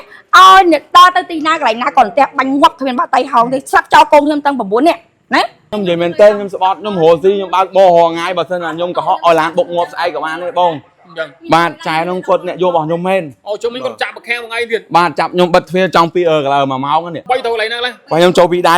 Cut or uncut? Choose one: cut